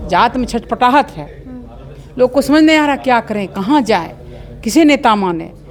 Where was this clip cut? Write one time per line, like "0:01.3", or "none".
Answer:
none